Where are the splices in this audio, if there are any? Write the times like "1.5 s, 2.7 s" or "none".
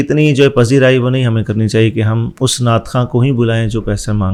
none